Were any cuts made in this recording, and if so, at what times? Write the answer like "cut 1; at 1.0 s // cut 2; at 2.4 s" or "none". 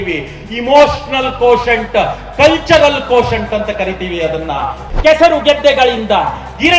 cut 1; at 4.8 s